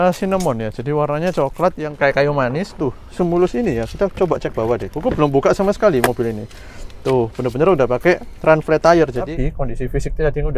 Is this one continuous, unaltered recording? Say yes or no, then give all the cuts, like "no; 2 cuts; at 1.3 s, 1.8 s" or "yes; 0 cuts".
no; 2 cuts; at 2.7 s, 9.3 s